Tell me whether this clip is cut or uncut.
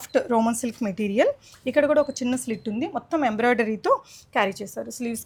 uncut